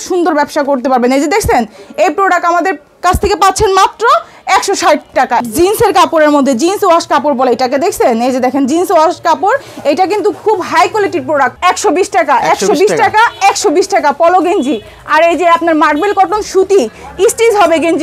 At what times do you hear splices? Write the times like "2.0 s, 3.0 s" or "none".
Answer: 5.4 s, 11.5 s